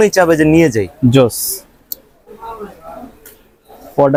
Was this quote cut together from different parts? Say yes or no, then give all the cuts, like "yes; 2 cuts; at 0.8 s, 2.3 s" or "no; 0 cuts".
no; 0 cuts